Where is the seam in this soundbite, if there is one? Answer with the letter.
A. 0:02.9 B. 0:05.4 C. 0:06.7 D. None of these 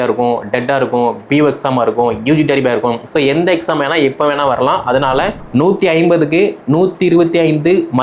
B